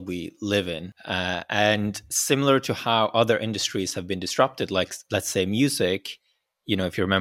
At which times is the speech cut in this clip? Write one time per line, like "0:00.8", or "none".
0:00.9

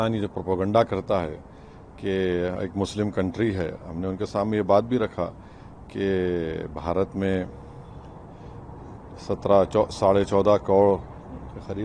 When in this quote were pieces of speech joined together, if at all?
none

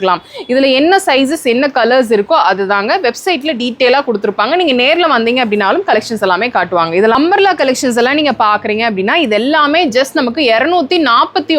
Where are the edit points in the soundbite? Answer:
0:07.1

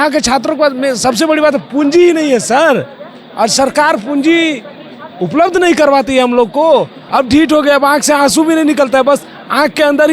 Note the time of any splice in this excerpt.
0:07.0

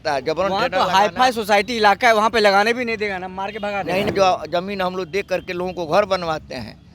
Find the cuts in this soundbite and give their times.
0:04.1

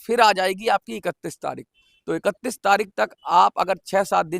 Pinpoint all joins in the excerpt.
none

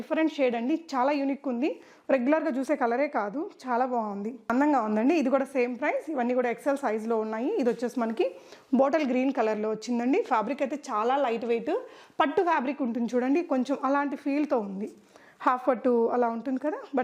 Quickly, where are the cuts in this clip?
none

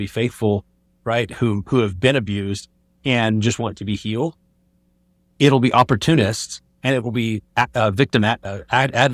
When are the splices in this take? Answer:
none

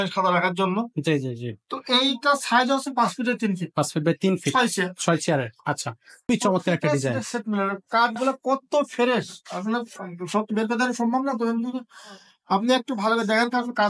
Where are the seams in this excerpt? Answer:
0:06.3

